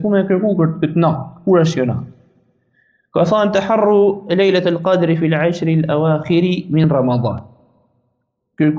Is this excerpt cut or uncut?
uncut